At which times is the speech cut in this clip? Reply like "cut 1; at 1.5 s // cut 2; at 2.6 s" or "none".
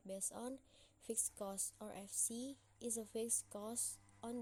none